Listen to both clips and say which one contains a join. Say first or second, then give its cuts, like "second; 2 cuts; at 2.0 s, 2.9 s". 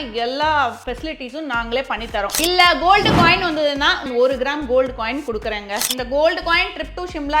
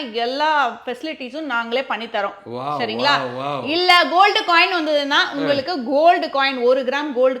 first; 3 cuts; at 2.4 s, 4.0 s, 5.9 s